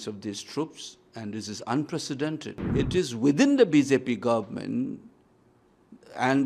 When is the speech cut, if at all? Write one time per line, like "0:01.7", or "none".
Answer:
0:02.5

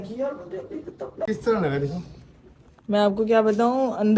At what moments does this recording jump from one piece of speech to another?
0:01.3

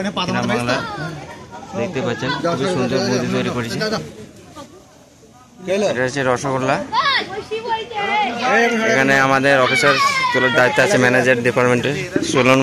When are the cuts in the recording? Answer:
none

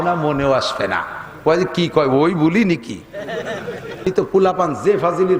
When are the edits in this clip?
0:04.1

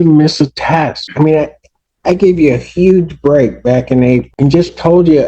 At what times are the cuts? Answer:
0:01.0
0:04.3

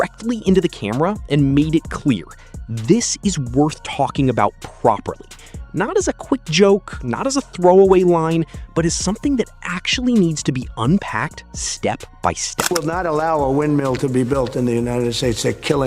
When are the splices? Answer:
0:12.7

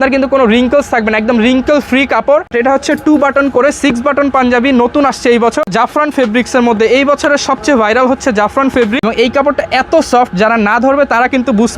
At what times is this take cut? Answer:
0:02.5
0:05.7
0:08.9

